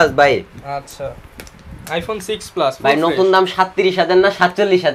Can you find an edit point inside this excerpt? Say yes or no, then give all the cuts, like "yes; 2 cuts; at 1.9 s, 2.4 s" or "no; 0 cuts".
no; 0 cuts